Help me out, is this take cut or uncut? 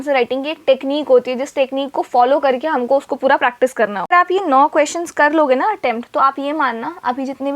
cut